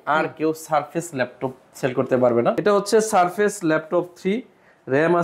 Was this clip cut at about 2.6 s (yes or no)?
yes